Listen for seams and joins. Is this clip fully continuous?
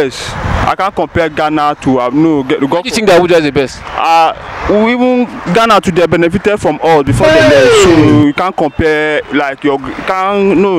yes; 0 cuts

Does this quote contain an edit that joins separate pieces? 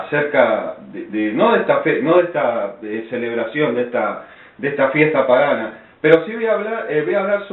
yes; 1 cut; at 5.9 s

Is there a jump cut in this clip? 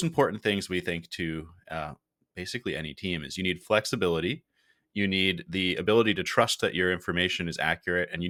no; 0 cuts

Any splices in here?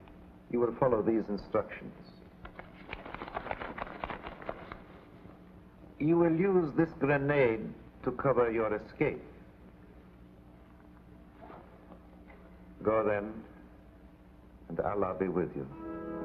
no; 0 cuts

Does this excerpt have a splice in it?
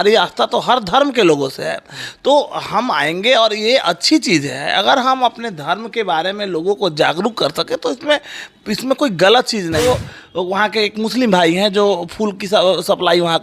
yes; 1 cut; at 9.8 s

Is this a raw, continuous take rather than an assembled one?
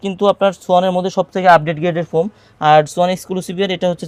yes; 0 cuts

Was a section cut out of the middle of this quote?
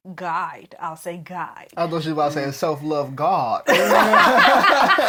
no; 0 cuts

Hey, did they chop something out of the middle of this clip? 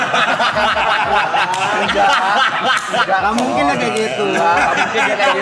no; 0 cuts

